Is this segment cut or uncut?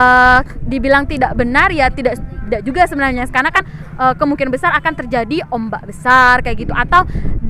cut